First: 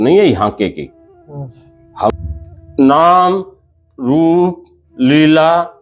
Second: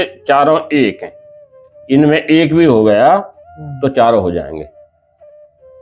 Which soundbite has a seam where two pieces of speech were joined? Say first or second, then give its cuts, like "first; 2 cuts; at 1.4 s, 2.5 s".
first; 1 cut; at 2.1 s